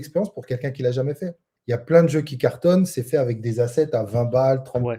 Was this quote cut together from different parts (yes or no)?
yes